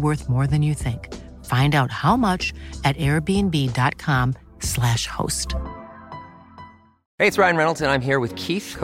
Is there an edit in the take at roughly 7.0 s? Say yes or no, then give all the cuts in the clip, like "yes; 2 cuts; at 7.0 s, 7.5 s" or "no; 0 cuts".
yes; 1 cut; at 7.0 s